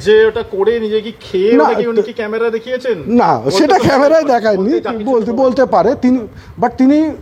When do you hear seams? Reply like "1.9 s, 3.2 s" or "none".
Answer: none